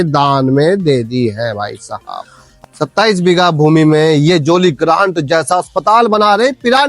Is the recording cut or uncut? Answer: cut